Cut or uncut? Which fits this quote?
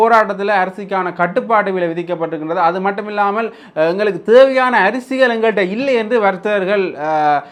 uncut